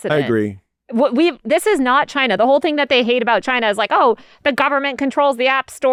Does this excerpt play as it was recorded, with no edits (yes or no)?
yes